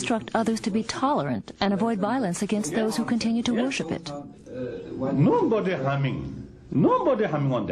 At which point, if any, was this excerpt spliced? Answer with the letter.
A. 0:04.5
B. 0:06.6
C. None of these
B